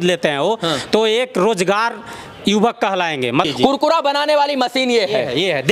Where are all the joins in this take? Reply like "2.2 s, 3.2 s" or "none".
3.5 s